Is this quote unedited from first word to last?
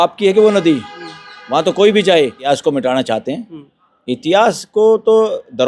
no; 1 cut; at 2.4 s

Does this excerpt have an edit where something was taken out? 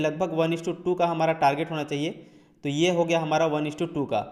no; 0 cuts

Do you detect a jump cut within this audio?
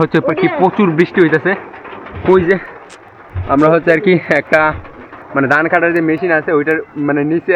no; 0 cuts

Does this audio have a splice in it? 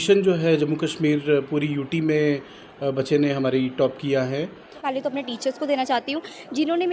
yes; 1 cut; at 4.7 s

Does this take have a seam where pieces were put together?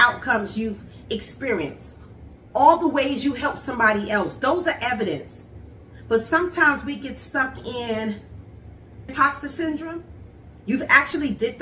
yes; 1 cut; at 9.1 s

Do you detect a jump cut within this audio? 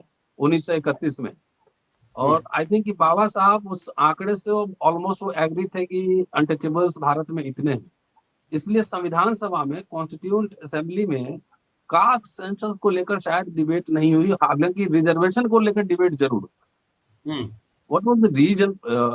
no; 0 cuts

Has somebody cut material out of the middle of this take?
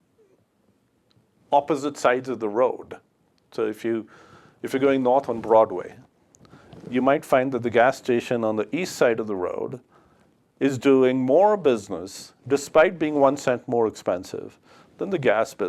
no; 0 cuts

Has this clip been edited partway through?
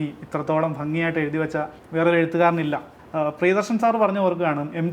yes; 2 cuts; at 1.8 s, 2.9 s

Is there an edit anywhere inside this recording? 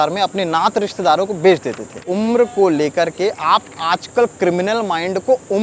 yes; 1 cut; at 2.1 s

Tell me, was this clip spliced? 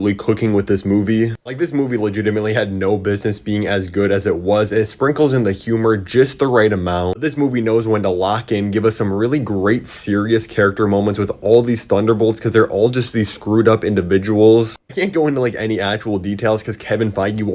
no; 0 cuts

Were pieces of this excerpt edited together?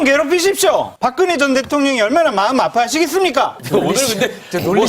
yes; 2 cuts; at 0.9 s, 3.6 s

